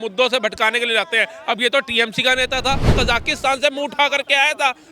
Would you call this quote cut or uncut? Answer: cut